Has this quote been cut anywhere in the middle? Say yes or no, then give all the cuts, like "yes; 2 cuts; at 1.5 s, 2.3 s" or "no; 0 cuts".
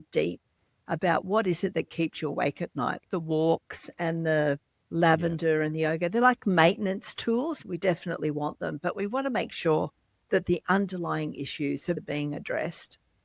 yes; 3 cuts; at 3.0 s, 7.5 s, 12.0 s